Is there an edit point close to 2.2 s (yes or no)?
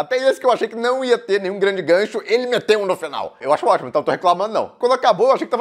no